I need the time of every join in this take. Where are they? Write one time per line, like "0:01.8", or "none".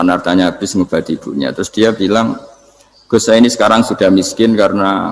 none